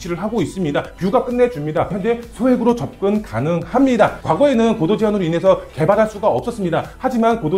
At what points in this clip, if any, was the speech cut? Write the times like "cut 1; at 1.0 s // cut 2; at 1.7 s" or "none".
cut 1; at 2.0 s // cut 2; at 4.2 s